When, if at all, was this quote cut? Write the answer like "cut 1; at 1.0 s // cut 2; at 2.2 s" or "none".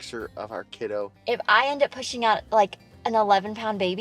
cut 1; at 1.1 s